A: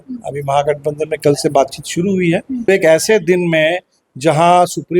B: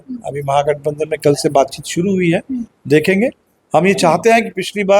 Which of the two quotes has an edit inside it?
A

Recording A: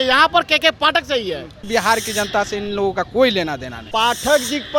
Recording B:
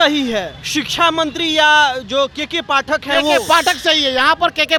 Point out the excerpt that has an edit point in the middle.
A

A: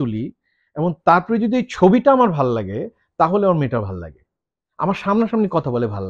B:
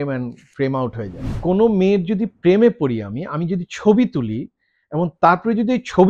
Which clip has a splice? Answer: B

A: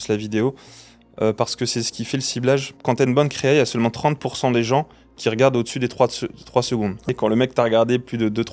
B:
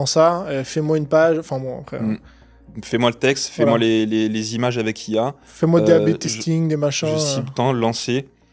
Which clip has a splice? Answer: A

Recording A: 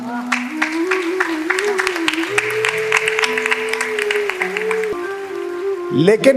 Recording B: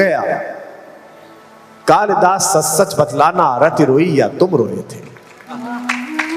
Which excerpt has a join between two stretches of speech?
A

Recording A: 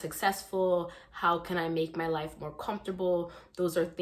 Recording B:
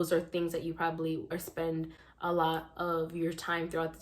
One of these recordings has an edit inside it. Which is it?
B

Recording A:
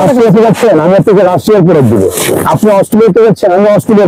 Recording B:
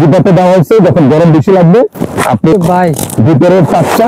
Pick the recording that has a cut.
B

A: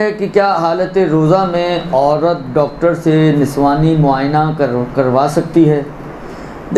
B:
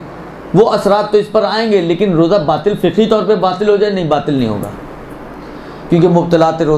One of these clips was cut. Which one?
B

